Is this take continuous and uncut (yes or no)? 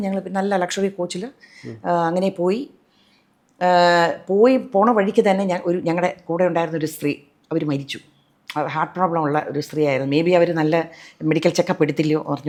yes